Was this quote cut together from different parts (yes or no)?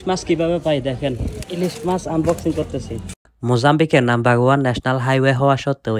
yes